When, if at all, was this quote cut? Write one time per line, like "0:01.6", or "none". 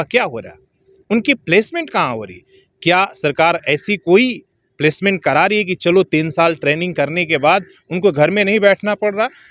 none

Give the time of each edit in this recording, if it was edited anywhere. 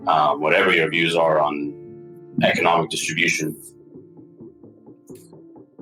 none

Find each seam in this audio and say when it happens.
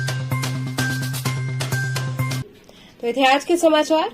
none

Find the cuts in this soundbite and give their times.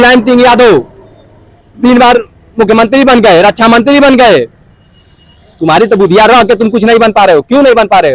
none

